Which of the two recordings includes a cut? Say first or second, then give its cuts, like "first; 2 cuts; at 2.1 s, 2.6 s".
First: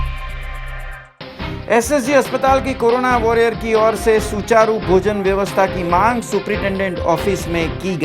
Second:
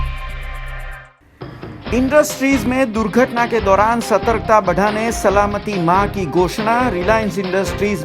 first; 1 cut; at 1.0 s